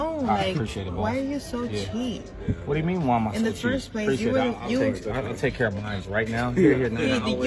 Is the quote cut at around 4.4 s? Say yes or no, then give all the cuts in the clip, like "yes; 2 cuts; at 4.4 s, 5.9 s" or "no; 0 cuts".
yes; 1 cut; at 4.4 s